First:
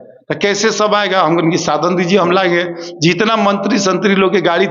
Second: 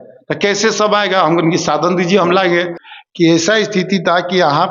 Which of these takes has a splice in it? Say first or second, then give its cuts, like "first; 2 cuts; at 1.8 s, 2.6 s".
second; 1 cut; at 2.8 s